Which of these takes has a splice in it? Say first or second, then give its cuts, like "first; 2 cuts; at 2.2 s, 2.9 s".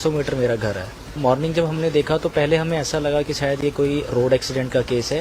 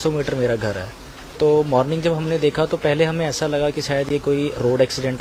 first; 1 cut; at 1.2 s